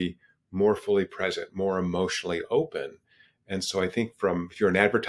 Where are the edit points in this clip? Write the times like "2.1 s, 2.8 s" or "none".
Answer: none

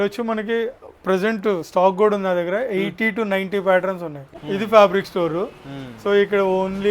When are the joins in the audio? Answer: 4.3 s

